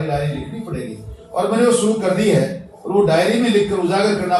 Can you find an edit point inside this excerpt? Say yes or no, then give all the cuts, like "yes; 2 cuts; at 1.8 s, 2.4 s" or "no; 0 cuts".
no; 0 cuts